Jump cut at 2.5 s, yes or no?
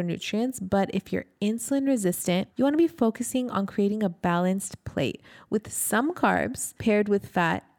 yes